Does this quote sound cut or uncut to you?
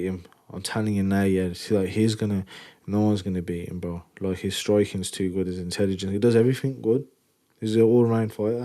uncut